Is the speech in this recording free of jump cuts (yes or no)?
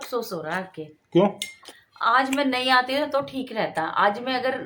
yes